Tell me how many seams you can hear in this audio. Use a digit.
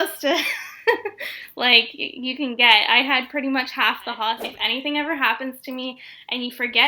1